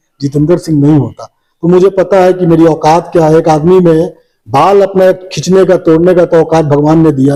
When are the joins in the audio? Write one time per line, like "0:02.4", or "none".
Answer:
none